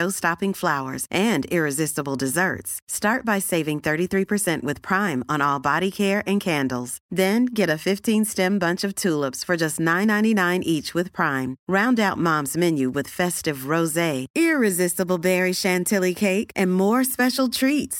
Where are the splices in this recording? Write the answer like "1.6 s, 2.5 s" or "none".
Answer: none